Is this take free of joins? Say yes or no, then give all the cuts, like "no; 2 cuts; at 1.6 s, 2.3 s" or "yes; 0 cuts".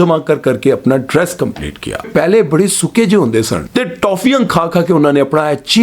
no; 2 cuts; at 2.0 s, 3.6 s